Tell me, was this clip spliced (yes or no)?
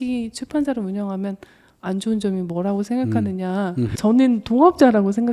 yes